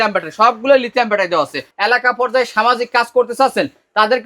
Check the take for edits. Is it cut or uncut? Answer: cut